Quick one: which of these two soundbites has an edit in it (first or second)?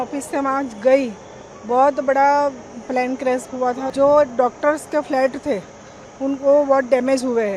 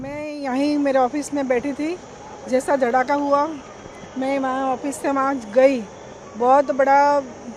first